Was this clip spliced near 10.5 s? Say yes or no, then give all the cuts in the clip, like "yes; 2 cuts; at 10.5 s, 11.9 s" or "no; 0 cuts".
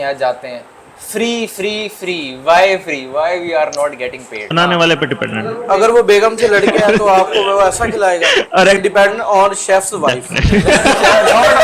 no; 2 cuts; at 4.5 s, 8.8 s